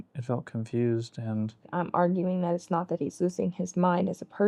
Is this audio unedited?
no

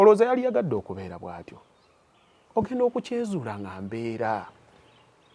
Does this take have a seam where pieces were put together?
no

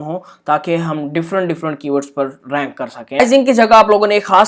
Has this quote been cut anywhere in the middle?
yes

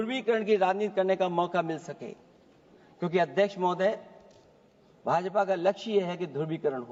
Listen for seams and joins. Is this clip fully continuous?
yes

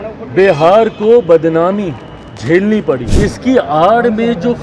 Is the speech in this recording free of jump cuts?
no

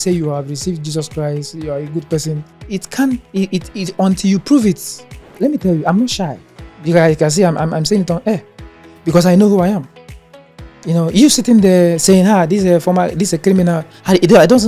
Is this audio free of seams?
no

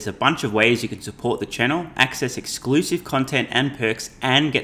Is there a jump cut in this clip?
no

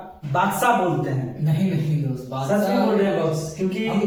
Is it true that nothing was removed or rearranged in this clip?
yes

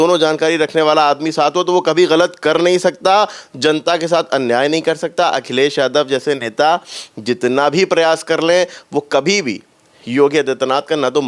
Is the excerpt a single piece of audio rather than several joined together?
yes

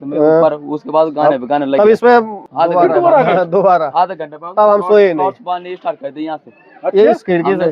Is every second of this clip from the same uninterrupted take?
no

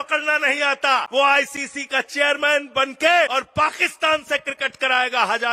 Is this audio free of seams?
no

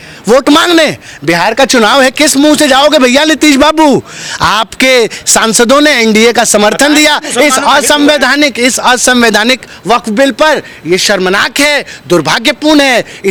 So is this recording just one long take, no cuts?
yes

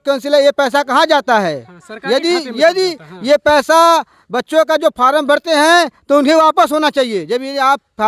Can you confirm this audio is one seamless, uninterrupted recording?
yes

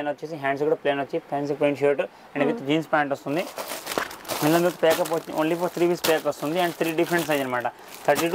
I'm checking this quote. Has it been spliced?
no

